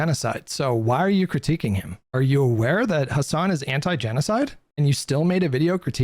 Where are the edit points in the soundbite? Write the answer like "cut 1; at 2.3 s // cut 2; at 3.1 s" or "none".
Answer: cut 1; at 2.0 s

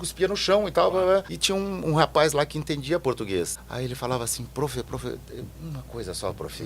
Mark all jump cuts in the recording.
cut 1; at 1.4 s // cut 2; at 3.6 s

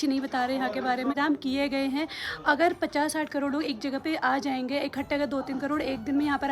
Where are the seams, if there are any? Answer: cut 1; at 1.1 s

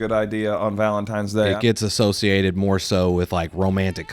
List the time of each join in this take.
cut 1; at 1.5 s

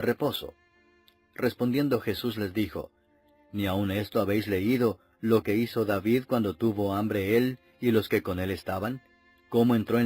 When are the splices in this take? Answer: cut 1; at 7.6 s

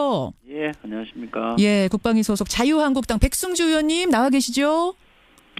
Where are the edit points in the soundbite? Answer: cut 1; at 3.8 s

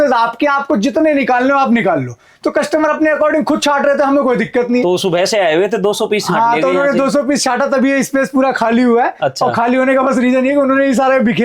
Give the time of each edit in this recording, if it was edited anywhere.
none

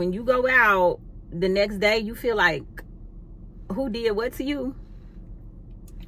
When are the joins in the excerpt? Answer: none

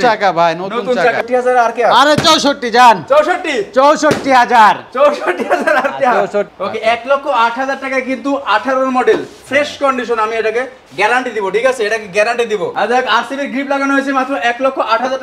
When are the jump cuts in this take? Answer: cut 1; at 1.2 s // cut 2; at 6.5 s // cut 3; at 12.7 s

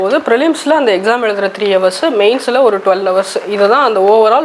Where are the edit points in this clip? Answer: none

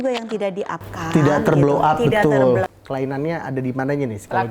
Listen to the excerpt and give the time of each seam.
cut 1; at 2.7 s

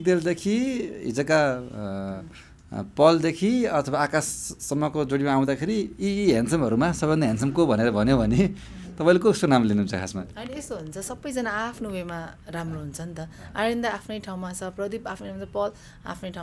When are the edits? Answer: none

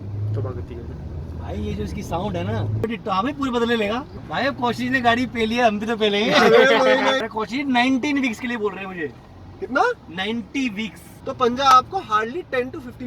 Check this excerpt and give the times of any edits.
cut 1; at 2.8 s // cut 2; at 4.2 s // cut 3; at 7.2 s // cut 4; at 11.1 s

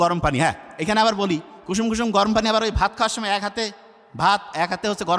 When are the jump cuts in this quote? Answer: none

